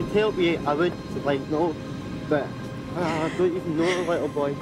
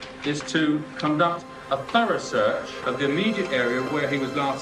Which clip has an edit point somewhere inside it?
second; 2 cuts; at 2.7 s, 3.9 s

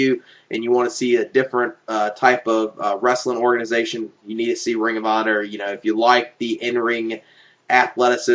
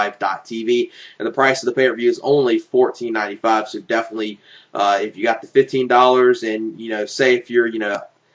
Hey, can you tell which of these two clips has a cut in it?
first; 1 cut; at 6.3 s

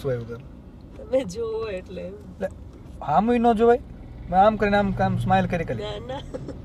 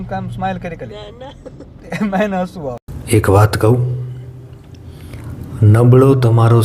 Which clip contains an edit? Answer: second; 1 cut; at 2.9 s

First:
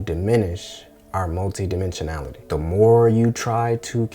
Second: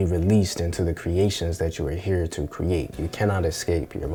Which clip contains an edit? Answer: first; 1 cut; at 2.3 s

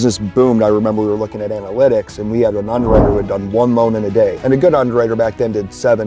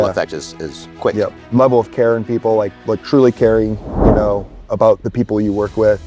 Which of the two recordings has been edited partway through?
first; 1 cut; at 4.4 s

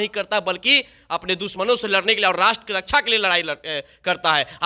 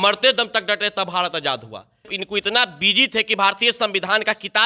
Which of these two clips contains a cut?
second; 1 cut; at 2.2 s

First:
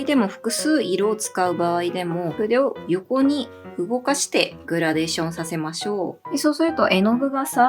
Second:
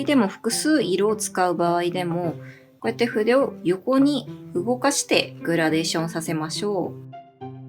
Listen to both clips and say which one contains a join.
first; 2 cuts; at 2.3 s, 6.2 s

